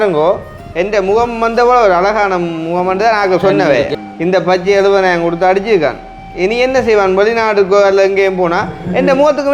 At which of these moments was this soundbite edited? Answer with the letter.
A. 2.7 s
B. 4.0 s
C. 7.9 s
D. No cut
B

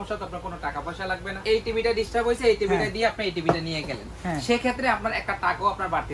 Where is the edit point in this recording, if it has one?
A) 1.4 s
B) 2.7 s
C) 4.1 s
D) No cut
A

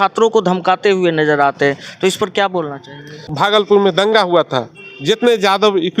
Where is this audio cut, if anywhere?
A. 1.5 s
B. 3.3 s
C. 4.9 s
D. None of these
B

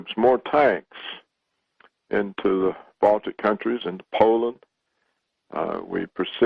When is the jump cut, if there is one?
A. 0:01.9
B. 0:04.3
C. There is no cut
B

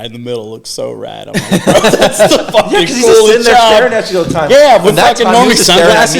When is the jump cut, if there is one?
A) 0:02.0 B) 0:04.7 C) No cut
A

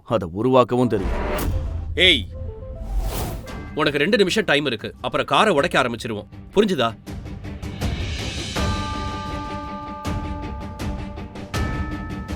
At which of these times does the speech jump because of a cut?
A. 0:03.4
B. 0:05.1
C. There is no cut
A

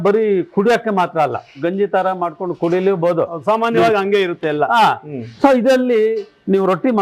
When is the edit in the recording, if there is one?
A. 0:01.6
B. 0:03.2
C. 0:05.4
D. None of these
A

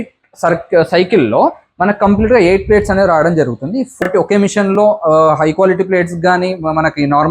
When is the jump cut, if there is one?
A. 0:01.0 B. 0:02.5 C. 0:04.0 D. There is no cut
C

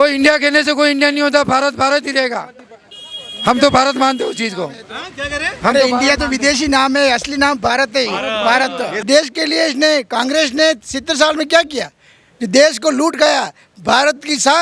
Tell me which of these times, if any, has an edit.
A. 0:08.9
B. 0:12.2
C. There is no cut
A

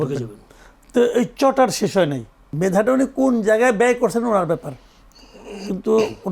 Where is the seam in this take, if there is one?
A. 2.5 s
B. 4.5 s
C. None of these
A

